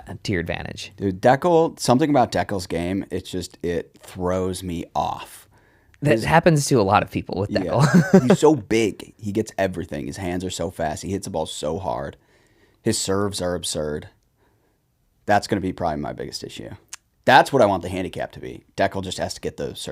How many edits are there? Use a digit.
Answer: 0